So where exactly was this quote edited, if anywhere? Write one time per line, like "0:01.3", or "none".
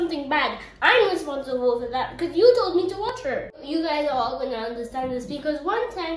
0:03.6